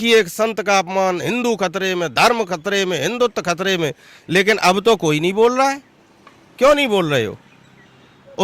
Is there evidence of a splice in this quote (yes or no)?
no